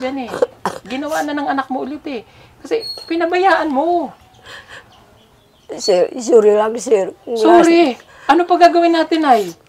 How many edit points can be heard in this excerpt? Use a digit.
0